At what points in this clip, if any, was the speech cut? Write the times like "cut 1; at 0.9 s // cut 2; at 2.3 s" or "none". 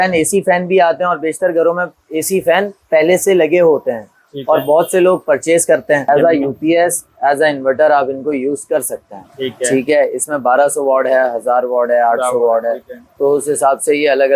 cut 1; at 6.1 s